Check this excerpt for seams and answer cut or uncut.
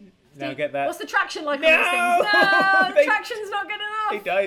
uncut